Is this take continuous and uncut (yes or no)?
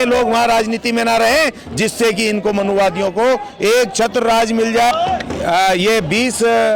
no